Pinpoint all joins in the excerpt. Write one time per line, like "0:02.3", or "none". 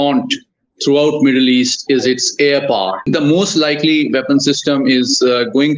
0:03.1